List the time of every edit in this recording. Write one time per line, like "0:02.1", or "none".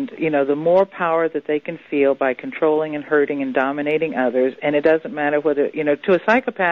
0:05.8